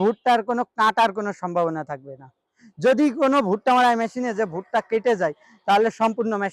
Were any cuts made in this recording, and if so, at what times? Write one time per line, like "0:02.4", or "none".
none